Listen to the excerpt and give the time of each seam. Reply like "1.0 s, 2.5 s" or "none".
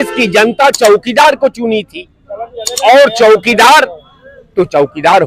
none